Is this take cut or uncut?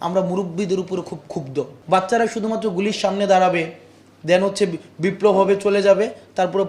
cut